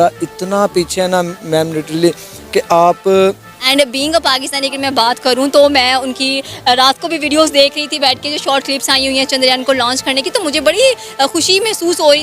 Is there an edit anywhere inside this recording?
yes; 1 cut; at 3.5 s

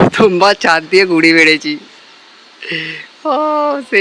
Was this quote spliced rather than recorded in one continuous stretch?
no; 0 cuts

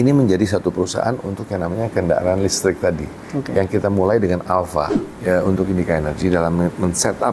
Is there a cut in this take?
yes; 1 cut; at 5.0 s

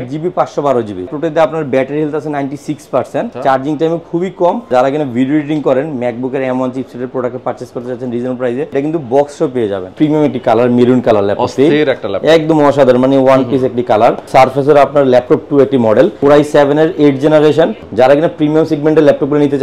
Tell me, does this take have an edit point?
yes; 8 cuts; at 1.1 s, 3.3 s, 4.7 s, 8.7 s, 9.9 s, 14.3 s, 16.2 s, 17.8 s

